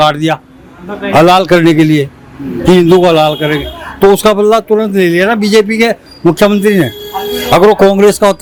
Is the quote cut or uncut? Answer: uncut